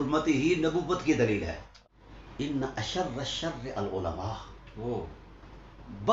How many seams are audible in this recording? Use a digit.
1